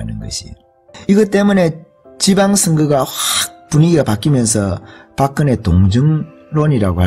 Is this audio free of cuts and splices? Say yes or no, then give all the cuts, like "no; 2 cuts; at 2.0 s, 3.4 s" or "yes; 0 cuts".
yes; 0 cuts